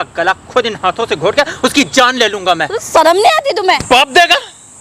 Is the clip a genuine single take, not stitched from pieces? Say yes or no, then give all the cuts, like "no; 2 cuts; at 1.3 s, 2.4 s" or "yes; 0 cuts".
no; 1 cut; at 3.8 s